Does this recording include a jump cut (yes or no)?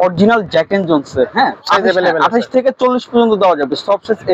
yes